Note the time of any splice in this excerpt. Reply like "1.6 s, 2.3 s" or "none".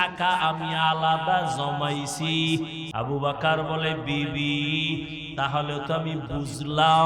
2.8 s